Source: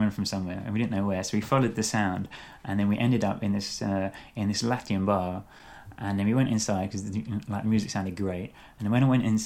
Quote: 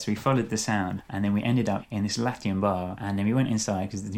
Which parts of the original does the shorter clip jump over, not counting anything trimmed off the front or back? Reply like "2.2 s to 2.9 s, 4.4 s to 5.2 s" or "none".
2.3 s to 2.6 s, 3.4 s to 4.3 s, 5.4 s to 6.0 s